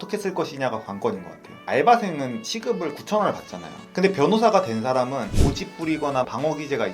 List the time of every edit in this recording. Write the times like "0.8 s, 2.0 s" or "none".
5.3 s